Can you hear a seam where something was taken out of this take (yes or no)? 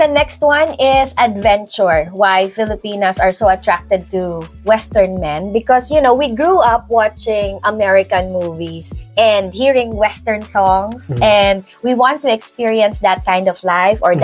no